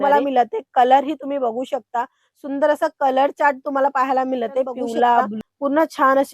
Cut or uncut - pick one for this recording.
cut